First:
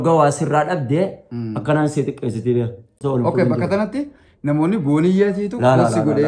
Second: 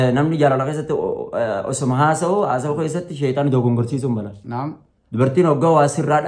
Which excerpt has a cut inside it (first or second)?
first